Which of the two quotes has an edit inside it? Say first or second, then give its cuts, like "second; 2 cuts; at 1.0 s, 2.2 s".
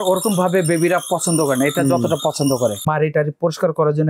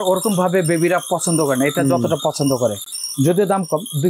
first; 1 cut; at 2.9 s